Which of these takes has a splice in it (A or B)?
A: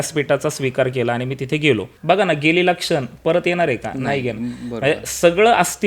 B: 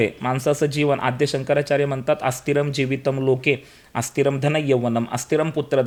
A